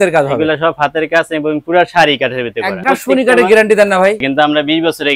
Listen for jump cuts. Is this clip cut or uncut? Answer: cut